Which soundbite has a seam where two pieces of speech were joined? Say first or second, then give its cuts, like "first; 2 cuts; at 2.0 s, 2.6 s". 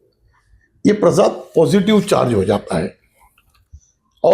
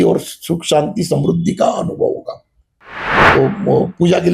second; 1 cut; at 3.1 s